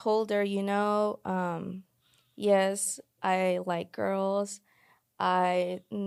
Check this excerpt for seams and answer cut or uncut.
uncut